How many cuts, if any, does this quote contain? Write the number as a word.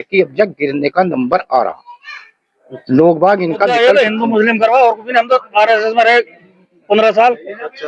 one